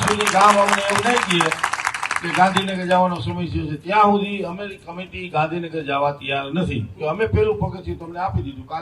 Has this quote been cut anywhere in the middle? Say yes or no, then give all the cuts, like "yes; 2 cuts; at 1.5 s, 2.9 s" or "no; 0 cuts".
yes; 1 cut; at 6.9 s